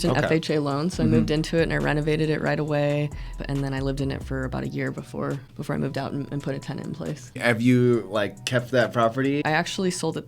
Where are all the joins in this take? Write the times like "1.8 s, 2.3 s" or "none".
3.4 s, 5.5 s, 7.4 s, 9.4 s